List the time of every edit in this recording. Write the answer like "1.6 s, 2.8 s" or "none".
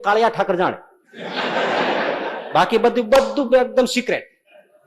none